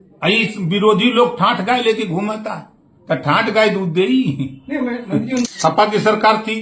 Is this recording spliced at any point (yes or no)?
yes